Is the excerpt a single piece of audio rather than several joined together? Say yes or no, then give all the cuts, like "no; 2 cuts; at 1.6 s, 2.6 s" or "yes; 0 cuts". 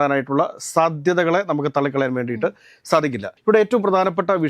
yes; 0 cuts